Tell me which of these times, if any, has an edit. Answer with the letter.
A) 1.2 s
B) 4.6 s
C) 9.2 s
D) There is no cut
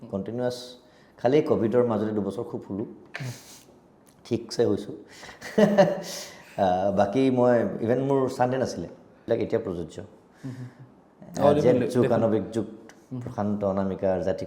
C